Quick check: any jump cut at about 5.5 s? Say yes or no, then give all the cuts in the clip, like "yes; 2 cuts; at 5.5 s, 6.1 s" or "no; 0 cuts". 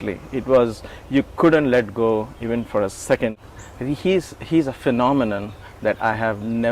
no; 1 cut; at 3.4 s